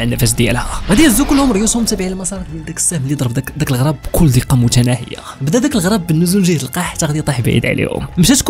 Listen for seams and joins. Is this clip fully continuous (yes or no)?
yes